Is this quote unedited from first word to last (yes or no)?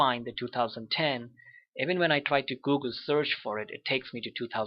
no